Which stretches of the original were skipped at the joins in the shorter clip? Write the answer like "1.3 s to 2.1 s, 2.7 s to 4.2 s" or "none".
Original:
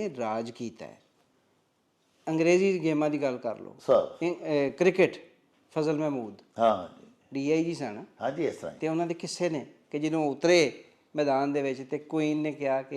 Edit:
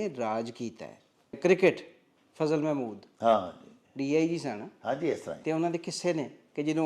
1.4 s to 4.7 s